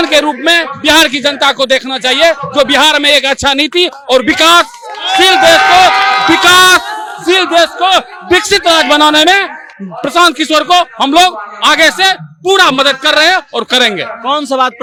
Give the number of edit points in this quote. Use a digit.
0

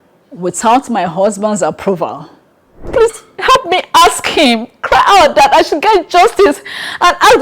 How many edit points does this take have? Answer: 1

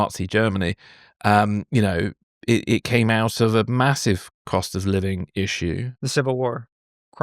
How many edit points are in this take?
1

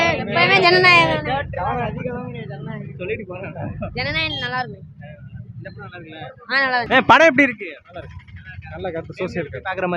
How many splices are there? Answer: 1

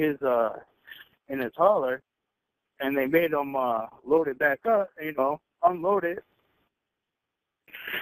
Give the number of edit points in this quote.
1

